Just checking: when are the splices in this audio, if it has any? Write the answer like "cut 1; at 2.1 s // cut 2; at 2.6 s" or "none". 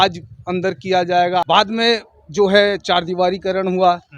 cut 1; at 1.4 s